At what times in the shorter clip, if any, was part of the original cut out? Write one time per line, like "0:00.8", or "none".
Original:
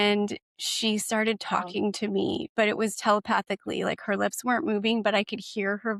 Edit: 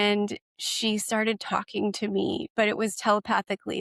none